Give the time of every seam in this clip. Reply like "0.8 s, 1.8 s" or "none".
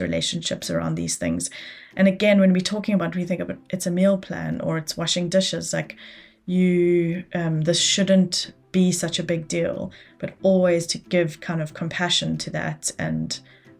none